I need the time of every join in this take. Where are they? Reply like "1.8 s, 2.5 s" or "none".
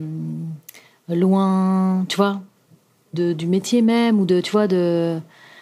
none